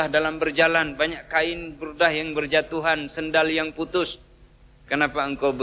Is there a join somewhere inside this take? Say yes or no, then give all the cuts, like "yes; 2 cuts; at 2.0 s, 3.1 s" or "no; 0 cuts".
no; 0 cuts